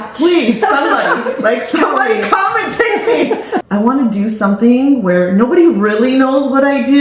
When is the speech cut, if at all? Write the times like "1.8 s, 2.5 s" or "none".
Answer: 3.6 s